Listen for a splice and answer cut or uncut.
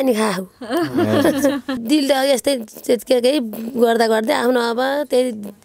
cut